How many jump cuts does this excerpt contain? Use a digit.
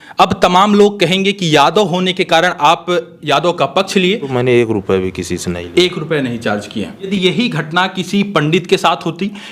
2